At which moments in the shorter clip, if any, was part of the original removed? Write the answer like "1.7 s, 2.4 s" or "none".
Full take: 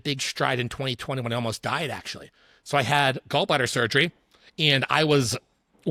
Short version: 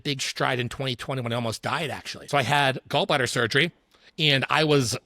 2.1 s